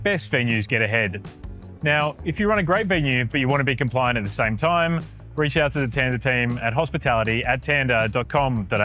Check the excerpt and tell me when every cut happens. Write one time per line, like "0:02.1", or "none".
none